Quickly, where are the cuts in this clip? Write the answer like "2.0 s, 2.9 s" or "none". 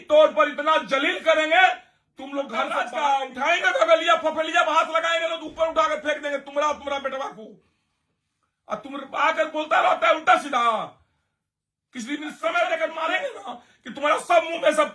2.8 s, 12.9 s